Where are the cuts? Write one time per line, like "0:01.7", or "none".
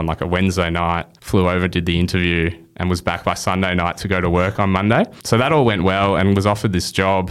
0:01.1
0:05.2